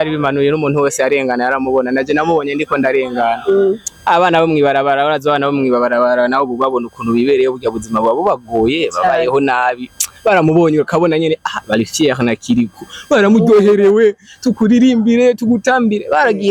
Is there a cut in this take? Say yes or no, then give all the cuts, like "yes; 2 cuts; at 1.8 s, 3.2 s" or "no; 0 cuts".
no; 0 cuts